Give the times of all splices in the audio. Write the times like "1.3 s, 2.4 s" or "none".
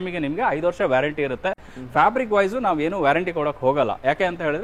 none